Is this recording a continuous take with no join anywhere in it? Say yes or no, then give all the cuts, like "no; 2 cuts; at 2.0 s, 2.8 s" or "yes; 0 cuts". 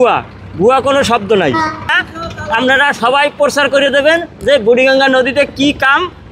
no; 1 cut; at 1.9 s